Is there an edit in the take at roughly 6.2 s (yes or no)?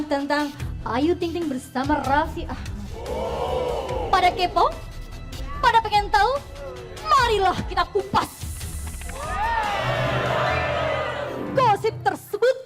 yes